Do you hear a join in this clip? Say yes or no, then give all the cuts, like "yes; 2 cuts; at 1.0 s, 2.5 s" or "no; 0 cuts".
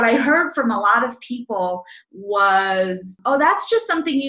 yes; 1 cut; at 3.1 s